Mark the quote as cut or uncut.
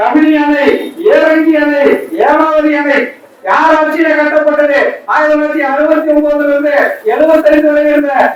uncut